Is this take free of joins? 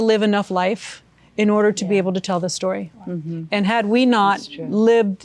yes; 0 cuts

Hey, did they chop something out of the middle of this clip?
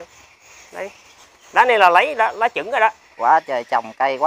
yes; 1 cut; at 3.1 s

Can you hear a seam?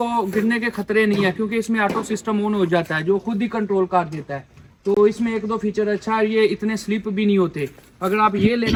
no; 0 cuts

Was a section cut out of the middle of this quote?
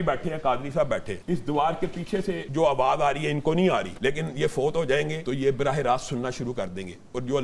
yes; 4 cuts; at 1.1 s, 2.4 s, 3.9 s, 5.2 s

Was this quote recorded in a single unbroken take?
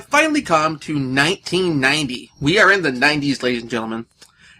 no; 1 cut; at 3.2 s

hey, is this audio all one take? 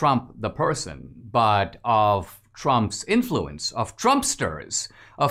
yes; 0 cuts

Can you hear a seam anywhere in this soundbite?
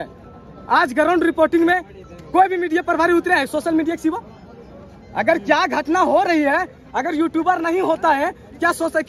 no; 0 cuts

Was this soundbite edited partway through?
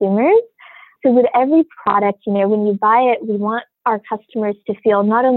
yes; 2 cuts; at 0.9 s, 3.7 s

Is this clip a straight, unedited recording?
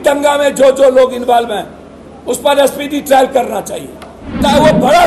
yes; 0 cuts

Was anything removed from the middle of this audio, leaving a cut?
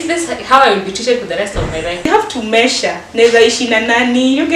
yes; 1 cut; at 2.1 s

